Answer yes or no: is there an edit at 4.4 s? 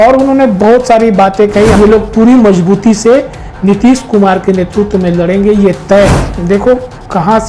no